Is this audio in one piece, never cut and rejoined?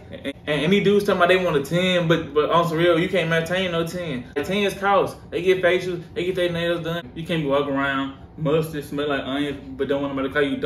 no; 1 cut; at 7.0 s

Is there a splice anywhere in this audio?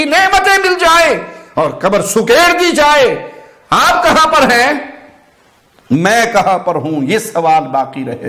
no; 0 cuts

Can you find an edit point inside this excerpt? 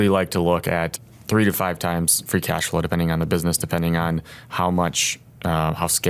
yes; 1 cut; at 1.0 s

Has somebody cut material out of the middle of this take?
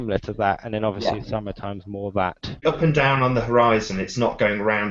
yes; 1 cut; at 2.6 s

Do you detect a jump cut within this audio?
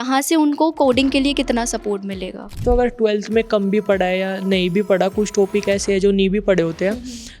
yes; 1 cut; at 2.6 s

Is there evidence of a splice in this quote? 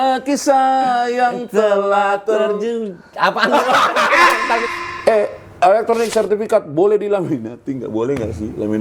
yes; 1 cut; at 4.6 s

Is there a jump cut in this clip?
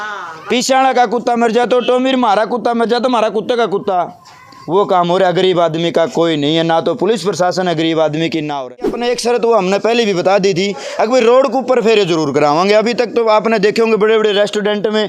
yes; 1 cut; at 9.0 s

